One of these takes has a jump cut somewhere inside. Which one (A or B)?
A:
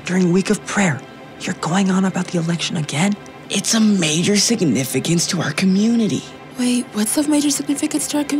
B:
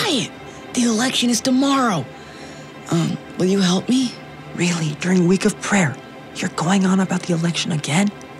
A